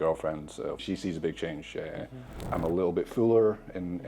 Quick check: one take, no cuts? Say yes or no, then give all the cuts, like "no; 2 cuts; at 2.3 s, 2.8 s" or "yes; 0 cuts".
no; 2 cuts; at 0.8 s, 2.4 s